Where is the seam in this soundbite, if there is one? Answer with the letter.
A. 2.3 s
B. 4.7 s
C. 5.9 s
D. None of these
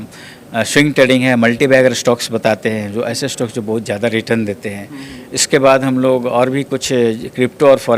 D